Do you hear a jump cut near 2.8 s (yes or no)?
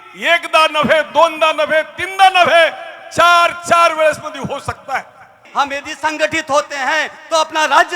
no